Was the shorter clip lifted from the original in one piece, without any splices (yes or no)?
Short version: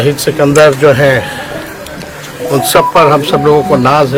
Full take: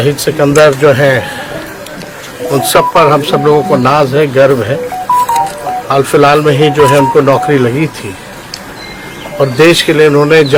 yes